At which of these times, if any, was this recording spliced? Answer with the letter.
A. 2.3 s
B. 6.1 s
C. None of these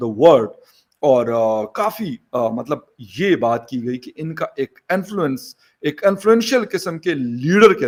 C